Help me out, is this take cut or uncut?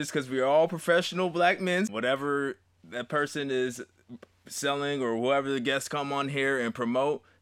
cut